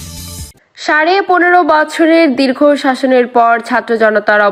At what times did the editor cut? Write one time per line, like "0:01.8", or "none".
none